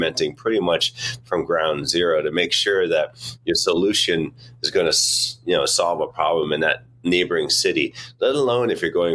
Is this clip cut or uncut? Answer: uncut